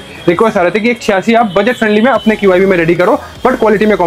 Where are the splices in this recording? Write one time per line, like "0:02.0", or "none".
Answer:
none